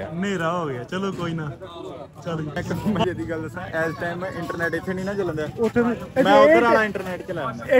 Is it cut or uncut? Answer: cut